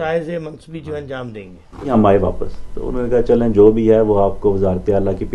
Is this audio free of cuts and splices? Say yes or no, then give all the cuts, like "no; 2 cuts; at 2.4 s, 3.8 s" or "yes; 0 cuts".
no; 1 cut; at 1.9 s